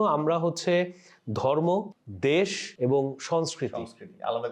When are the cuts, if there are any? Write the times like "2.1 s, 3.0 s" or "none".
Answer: 2.0 s, 2.6 s

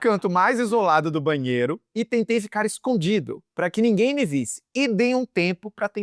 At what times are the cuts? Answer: none

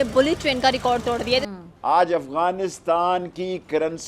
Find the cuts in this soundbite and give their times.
1.5 s

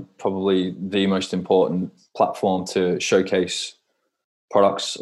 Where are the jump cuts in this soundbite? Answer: 2.0 s

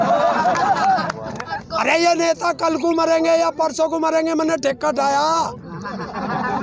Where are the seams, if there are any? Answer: 1.6 s

